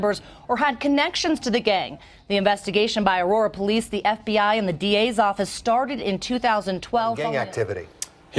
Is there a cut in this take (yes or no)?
yes